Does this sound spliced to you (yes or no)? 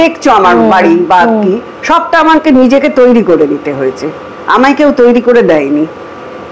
no